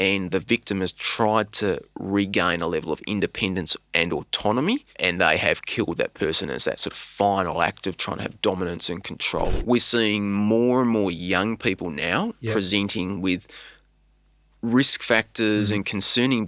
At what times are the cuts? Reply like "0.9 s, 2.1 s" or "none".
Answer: 4.9 s, 9.5 s